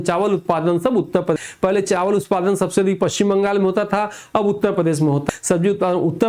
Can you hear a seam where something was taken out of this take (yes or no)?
yes